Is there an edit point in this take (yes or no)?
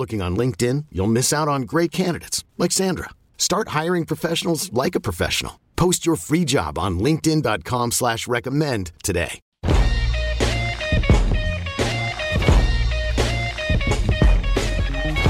yes